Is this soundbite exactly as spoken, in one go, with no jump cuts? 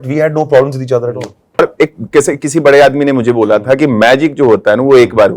no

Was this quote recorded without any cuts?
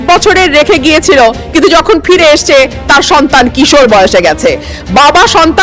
yes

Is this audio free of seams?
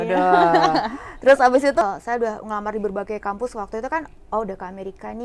no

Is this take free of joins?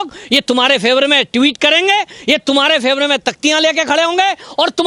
yes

